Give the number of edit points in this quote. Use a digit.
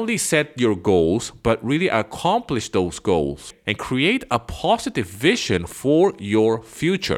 0